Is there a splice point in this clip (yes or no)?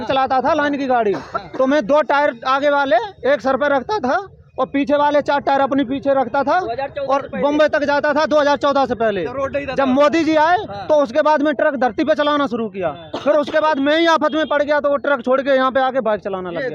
no